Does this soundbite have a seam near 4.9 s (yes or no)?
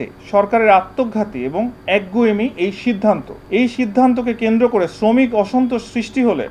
no